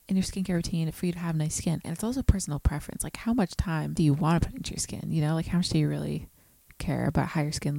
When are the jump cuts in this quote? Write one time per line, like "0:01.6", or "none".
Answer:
0:01.9